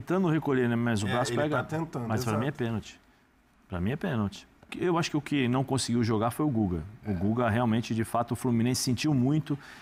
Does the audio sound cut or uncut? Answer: cut